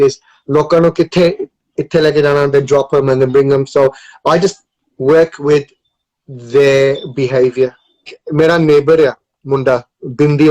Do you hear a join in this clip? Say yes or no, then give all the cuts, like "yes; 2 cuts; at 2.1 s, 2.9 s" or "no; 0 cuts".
yes; 1 cut; at 8.2 s